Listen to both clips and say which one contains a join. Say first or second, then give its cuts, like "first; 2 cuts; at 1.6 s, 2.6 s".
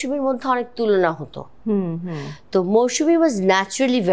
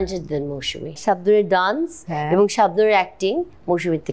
second; 1 cut; at 1.0 s